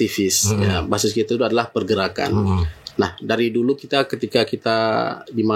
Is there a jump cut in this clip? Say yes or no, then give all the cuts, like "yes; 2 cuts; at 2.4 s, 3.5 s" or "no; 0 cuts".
no; 0 cuts